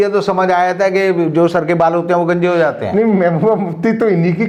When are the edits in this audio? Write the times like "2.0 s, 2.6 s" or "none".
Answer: none